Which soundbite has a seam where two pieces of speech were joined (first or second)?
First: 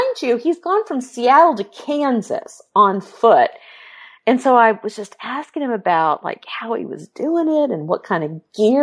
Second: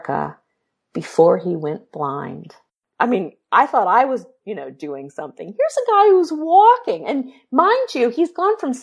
second